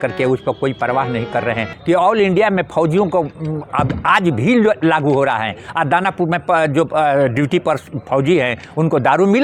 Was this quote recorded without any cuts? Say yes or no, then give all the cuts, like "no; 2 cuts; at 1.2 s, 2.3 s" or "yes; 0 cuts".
no; 1 cut; at 1.7 s